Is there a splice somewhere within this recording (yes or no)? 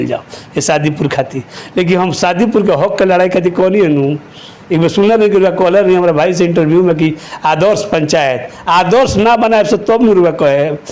no